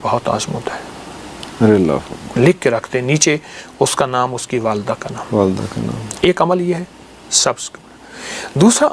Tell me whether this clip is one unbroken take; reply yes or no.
yes